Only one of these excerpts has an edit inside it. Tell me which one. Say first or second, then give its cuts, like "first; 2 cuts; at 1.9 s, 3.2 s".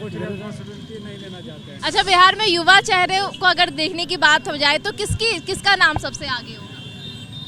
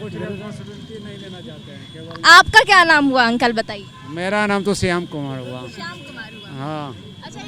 first; 1 cut; at 1.7 s